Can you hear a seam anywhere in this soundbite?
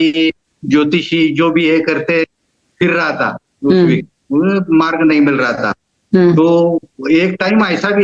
no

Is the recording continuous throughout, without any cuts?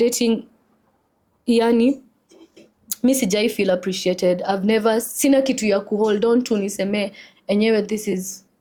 yes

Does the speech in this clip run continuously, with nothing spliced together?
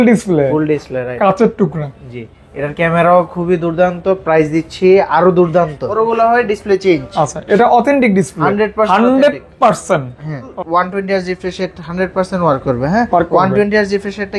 no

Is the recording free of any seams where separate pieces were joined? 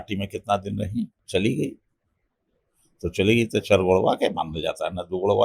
no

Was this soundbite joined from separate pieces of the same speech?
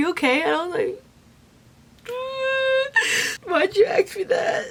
no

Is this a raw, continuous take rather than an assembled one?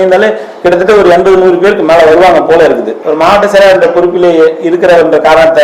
no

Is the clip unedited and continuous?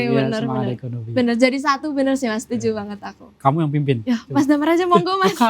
yes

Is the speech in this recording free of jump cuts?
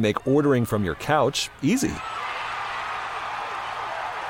yes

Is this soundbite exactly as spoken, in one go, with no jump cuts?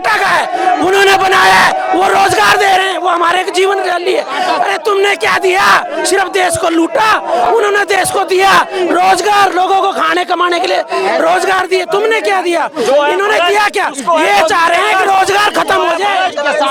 yes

